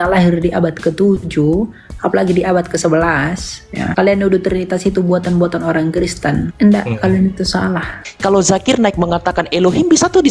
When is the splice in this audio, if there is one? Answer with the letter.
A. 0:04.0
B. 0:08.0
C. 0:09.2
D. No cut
B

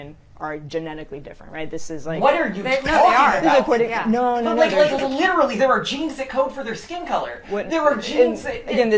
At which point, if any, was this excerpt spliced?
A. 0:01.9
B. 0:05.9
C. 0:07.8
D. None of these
A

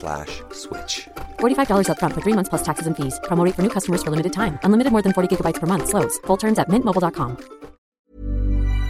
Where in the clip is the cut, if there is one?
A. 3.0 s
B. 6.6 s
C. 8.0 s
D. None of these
C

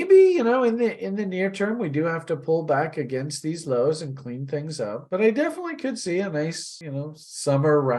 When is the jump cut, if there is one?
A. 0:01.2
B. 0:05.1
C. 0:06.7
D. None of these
C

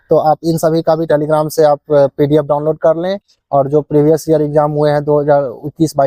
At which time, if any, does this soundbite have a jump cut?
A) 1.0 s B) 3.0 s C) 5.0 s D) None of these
A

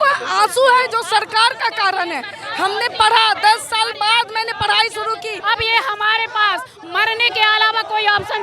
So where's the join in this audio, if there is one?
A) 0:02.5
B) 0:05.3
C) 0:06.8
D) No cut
B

